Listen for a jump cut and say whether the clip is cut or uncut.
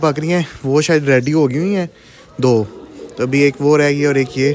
uncut